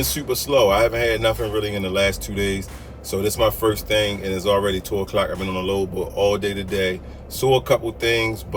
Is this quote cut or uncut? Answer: uncut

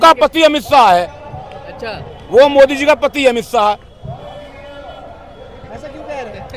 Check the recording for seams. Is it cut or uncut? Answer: uncut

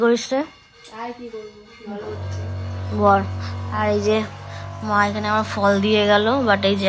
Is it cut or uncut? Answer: uncut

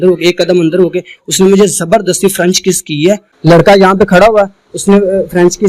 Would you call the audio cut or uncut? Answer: cut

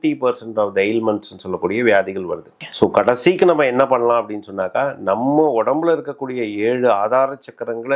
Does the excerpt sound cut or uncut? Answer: cut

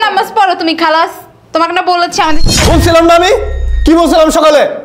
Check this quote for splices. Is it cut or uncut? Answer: cut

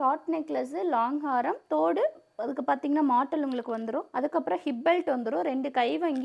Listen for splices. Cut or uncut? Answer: cut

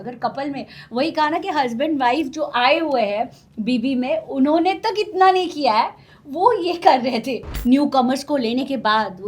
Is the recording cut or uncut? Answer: cut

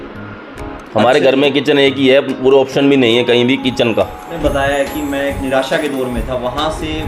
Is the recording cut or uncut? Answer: cut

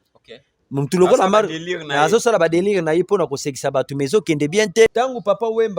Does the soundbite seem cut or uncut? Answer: cut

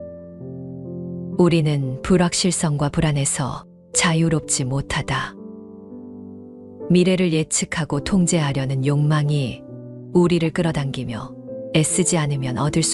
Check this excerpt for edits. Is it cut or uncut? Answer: uncut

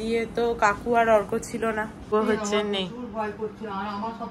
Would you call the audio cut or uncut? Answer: cut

